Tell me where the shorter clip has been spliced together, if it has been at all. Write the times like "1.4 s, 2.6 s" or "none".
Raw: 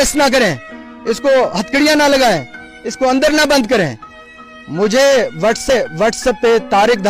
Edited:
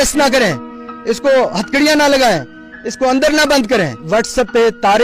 4.0 s